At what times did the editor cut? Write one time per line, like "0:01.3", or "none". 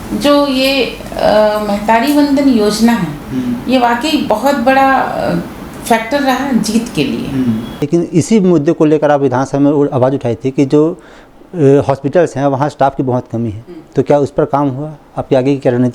0:07.8